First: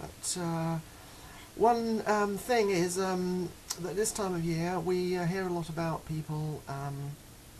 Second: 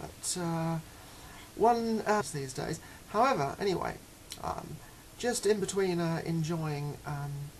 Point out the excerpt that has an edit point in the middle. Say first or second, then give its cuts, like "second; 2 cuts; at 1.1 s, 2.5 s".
first; 1 cut; at 2.2 s